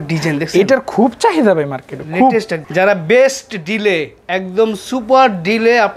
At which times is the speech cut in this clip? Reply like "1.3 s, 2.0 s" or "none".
2.6 s